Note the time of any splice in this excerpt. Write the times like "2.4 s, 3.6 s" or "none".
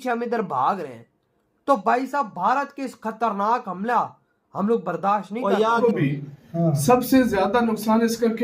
5.8 s